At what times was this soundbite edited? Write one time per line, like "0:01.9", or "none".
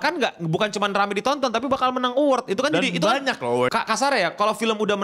0:03.7